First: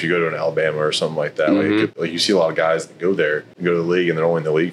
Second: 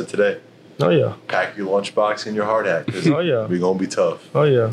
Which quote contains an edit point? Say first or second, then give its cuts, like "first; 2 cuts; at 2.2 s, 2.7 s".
first; 2 cuts; at 1.9 s, 3.5 s